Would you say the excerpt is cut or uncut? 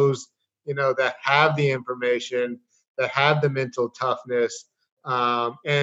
uncut